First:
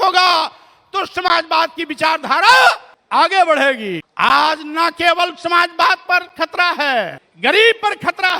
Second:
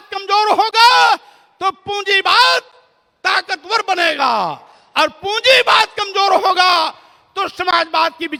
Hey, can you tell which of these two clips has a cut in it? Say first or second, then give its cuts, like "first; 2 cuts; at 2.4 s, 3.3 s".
first; 3 cuts; at 2.9 s, 4.0 s, 7.2 s